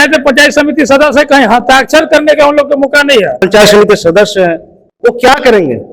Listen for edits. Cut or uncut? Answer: cut